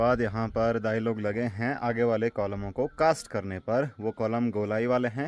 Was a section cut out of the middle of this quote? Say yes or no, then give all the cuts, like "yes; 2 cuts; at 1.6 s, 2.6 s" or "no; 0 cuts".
no; 0 cuts